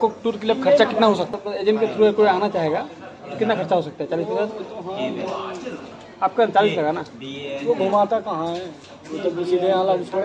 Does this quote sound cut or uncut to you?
cut